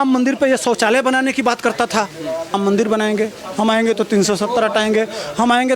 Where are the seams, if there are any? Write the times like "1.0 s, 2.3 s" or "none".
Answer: 2.5 s